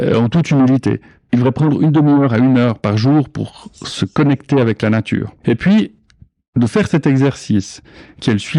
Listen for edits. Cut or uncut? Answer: cut